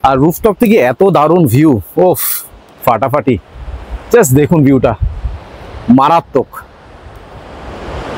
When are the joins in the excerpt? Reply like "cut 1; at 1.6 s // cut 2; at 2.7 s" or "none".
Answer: none